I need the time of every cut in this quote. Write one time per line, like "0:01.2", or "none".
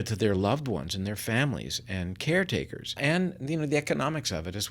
0:02.9